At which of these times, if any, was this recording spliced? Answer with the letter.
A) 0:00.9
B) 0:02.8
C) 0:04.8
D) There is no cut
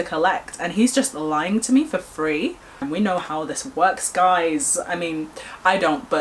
B